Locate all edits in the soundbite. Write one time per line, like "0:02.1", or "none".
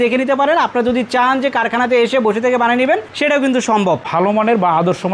0:04.1